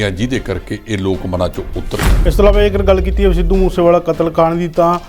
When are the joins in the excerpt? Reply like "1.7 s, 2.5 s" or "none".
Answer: 2.1 s